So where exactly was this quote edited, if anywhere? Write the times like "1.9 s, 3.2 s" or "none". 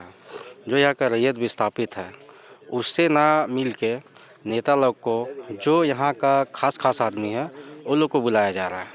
none